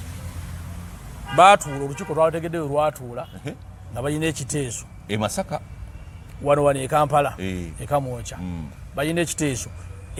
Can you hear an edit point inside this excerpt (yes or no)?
no